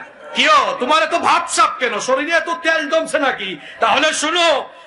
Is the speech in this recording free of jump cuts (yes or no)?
yes